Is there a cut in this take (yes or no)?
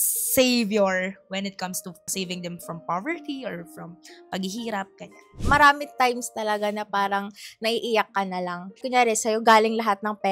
yes